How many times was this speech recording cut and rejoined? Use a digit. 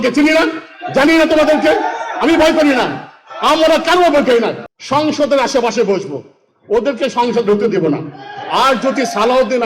1